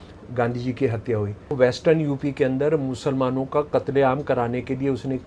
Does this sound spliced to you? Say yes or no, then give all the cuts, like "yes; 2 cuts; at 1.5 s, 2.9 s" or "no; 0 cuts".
yes; 1 cut; at 1.6 s